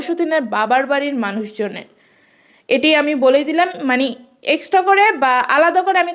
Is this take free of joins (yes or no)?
yes